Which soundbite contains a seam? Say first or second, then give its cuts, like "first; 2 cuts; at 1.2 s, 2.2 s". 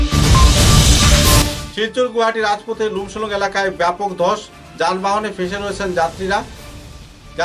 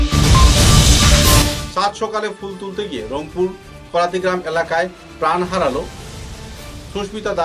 second; 1 cut; at 1.6 s